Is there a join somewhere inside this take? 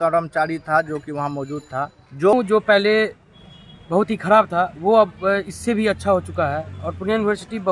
yes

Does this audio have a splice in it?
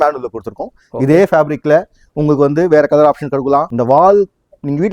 yes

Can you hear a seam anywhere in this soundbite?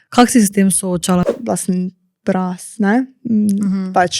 yes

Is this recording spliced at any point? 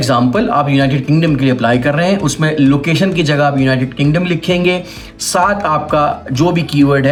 no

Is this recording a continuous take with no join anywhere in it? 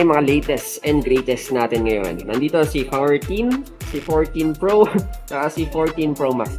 yes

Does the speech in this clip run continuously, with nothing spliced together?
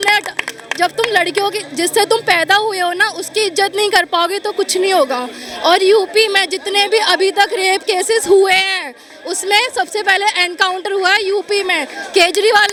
yes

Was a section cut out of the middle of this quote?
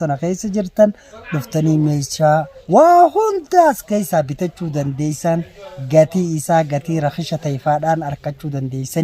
yes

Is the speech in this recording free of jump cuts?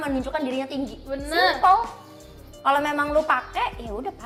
yes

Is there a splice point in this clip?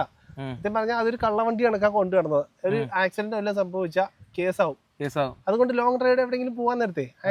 no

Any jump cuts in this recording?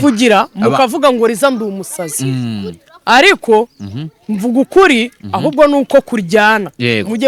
no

